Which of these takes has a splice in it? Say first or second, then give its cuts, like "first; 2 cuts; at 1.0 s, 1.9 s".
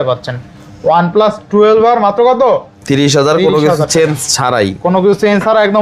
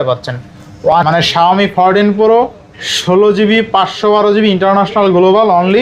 second; 1 cut; at 0.9 s